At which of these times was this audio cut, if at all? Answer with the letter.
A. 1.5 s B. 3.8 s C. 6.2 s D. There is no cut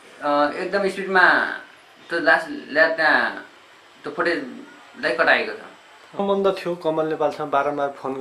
C